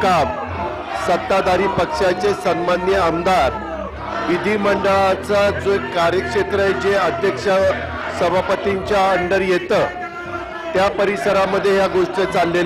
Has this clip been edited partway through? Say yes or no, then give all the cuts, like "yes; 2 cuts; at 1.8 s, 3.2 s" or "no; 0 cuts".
no; 0 cuts